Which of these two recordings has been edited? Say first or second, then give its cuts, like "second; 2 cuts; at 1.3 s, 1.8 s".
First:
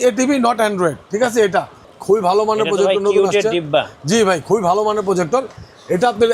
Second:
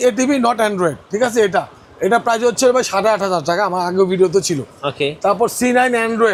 first; 1 cut; at 1.8 s